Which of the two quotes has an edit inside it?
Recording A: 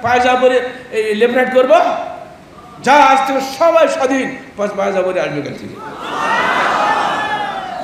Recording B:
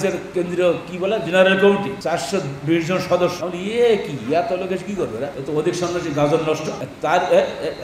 B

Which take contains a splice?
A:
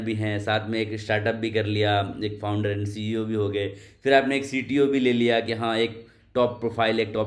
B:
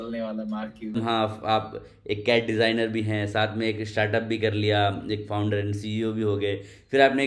B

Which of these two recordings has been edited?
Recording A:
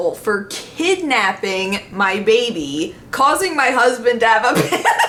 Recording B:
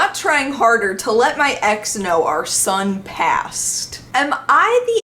B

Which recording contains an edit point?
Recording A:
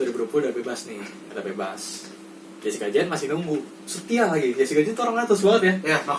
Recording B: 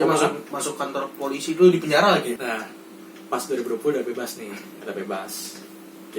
B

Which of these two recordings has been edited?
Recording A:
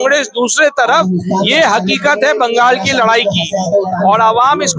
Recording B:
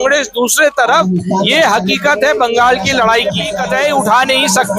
B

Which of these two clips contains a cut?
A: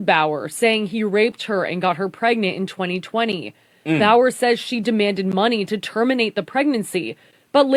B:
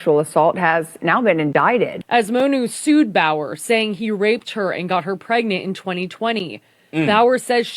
B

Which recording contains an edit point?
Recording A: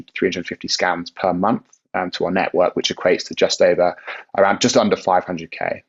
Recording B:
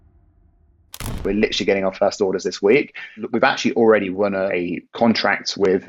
B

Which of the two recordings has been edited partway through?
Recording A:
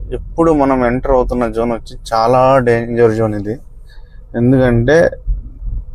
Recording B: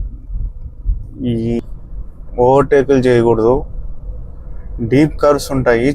B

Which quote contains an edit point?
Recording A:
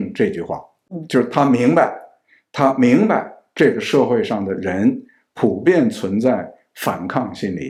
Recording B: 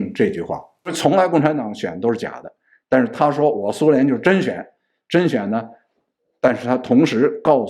B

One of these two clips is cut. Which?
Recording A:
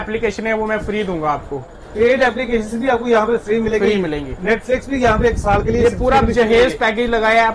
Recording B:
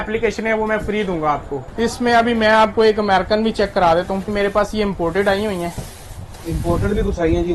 B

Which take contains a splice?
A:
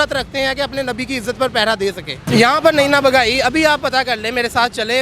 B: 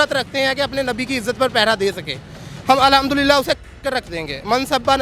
A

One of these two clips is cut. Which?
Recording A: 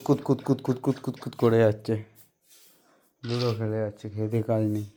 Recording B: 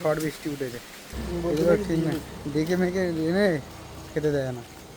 B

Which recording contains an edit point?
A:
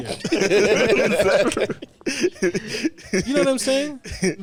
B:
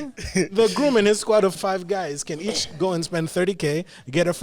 B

